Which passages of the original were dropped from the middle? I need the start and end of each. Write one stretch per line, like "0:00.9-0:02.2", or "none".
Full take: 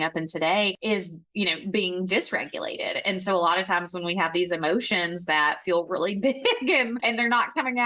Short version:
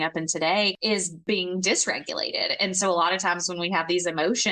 0:01.2-0:01.6